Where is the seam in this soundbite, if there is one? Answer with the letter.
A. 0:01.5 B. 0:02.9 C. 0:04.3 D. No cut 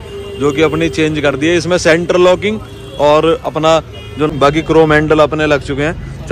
C